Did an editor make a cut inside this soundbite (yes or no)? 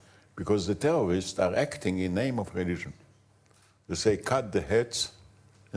no